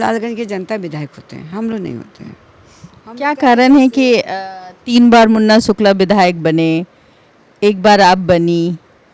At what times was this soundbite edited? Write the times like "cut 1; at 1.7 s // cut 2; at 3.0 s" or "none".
none